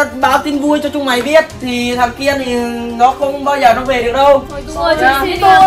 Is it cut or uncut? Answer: uncut